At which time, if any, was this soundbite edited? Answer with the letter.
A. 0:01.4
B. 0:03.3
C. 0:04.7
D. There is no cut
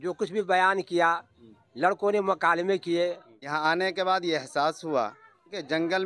B